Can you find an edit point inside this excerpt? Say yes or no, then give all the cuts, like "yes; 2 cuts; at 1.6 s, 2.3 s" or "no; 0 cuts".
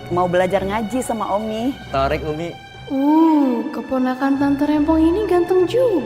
yes; 2 cuts; at 1.8 s, 2.7 s